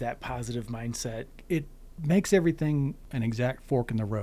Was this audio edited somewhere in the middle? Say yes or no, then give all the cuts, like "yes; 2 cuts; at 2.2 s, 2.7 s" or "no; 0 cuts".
yes; 2 cuts; at 1.3 s, 3.0 s